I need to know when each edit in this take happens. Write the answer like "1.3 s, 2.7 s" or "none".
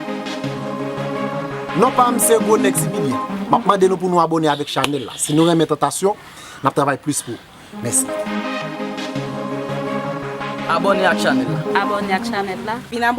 1.7 s